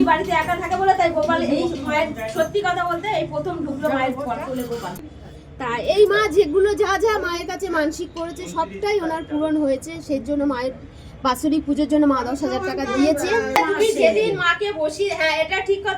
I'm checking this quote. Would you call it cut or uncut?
cut